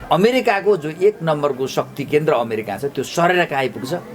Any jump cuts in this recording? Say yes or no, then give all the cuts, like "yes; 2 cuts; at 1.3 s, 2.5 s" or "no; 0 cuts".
no; 0 cuts